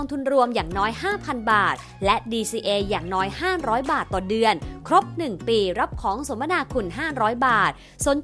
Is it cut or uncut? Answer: uncut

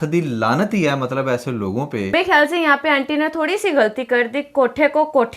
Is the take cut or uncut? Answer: cut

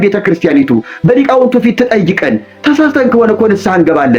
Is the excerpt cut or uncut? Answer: uncut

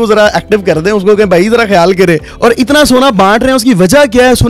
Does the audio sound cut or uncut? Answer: cut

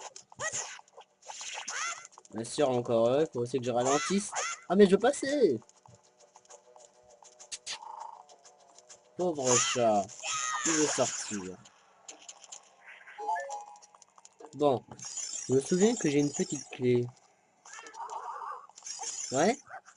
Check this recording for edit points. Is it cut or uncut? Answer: uncut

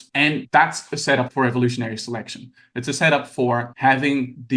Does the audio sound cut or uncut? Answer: uncut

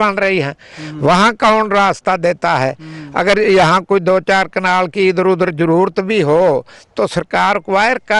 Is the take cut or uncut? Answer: uncut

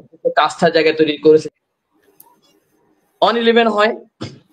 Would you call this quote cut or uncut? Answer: cut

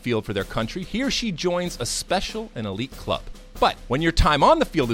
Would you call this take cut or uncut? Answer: cut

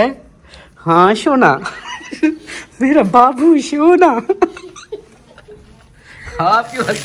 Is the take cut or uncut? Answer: uncut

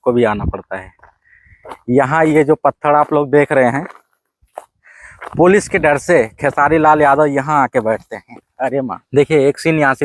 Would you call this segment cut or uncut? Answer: cut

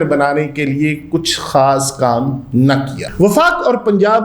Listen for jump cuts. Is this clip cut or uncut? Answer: cut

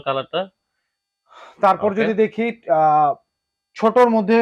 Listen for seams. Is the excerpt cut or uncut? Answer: uncut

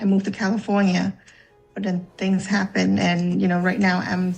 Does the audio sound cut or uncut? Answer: uncut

